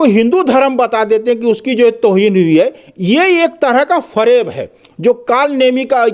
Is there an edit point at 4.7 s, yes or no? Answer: no